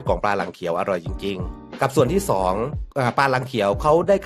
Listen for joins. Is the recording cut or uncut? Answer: cut